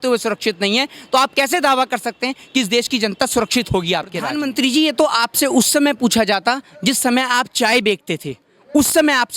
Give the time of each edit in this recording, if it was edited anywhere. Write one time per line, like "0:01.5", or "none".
0:04.4